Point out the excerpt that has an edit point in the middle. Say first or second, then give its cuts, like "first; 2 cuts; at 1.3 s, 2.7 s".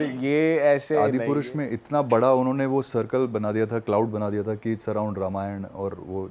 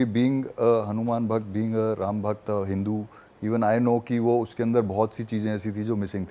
first; 1 cut; at 1.1 s